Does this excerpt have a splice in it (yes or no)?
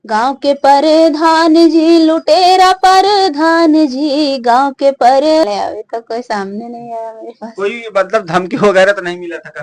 yes